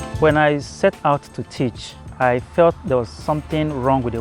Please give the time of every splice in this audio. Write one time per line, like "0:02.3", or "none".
0:02.1